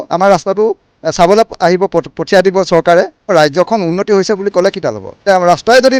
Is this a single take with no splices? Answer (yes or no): no